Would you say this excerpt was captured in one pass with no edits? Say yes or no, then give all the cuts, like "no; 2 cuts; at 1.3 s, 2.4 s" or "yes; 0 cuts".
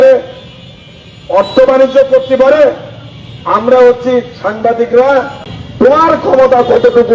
no; 1 cut; at 5.9 s